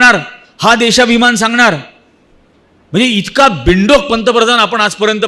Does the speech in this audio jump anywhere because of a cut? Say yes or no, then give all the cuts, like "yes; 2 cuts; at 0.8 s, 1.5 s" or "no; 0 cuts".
no; 0 cuts